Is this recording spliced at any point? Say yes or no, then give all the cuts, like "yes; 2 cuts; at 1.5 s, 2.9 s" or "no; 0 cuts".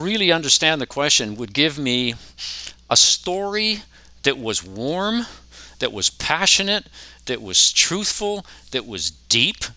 no; 0 cuts